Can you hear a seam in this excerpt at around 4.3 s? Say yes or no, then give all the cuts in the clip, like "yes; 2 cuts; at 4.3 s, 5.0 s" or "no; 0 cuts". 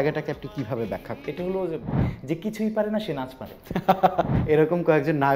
yes; 2 cuts; at 2.0 s, 4.3 s